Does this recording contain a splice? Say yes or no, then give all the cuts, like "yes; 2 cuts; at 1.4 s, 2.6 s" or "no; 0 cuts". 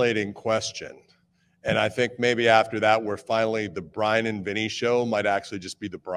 no; 0 cuts